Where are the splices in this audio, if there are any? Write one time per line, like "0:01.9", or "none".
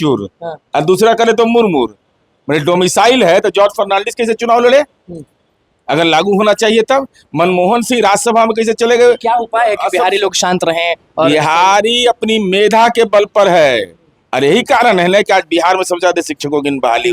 none